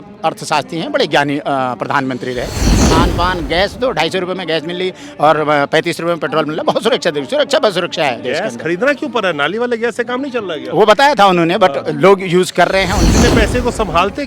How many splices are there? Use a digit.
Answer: 2